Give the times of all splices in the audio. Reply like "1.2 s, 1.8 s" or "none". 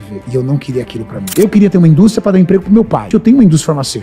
1.3 s, 3.1 s

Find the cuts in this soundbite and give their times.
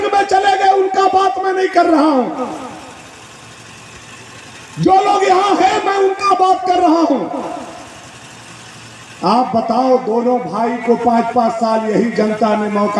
none

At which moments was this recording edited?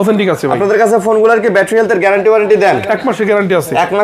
none

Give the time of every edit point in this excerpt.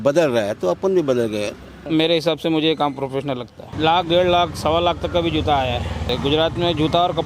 1.8 s, 3.6 s, 6.1 s

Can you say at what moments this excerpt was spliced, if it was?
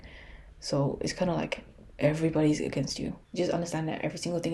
3.2 s

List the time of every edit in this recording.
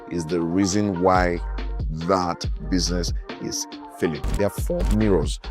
4.4 s

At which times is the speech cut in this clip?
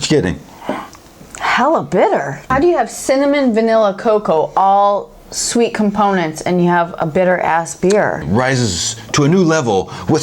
1.3 s, 2.4 s, 8.2 s

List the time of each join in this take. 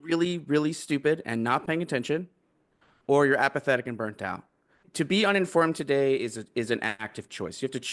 4.8 s

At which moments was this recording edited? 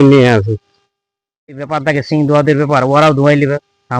1.7 s

